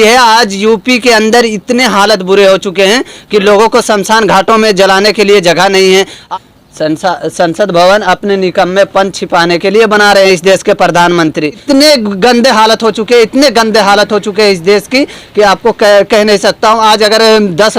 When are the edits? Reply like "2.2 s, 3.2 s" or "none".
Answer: 6.2 s, 11.6 s